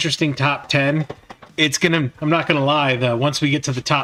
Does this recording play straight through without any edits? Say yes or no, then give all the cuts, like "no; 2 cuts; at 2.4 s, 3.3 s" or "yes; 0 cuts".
yes; 0 cuts